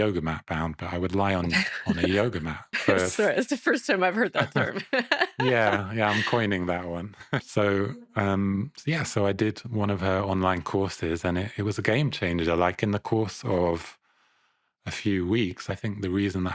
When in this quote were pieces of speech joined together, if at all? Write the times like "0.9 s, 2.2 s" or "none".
7.4 s, 15.7 s